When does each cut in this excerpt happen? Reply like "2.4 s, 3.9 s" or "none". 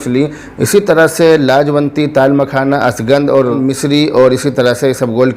3.6 s

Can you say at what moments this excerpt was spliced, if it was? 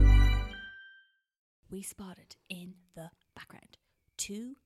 1.5 s

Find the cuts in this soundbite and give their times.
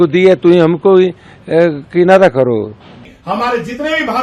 3.1 s

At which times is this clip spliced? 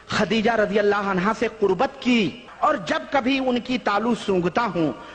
2.4 s

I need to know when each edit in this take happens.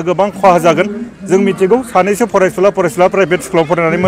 none

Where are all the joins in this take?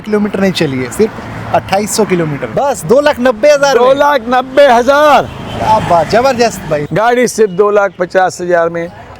2.4 s, 6.8 s

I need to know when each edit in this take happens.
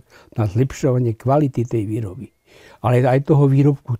none

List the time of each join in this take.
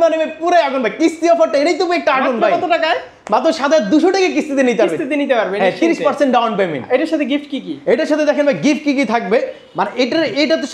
none

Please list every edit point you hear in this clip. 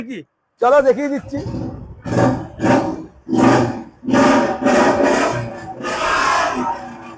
none

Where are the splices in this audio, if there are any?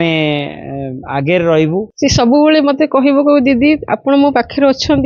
1.9 s

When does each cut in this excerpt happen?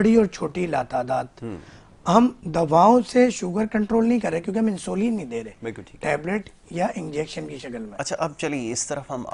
none

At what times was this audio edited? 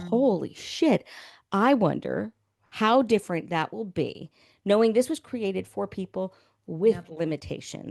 none

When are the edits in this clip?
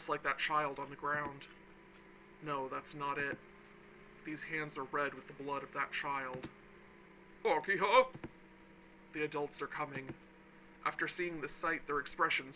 none

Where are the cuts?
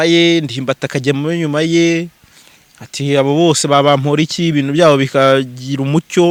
none

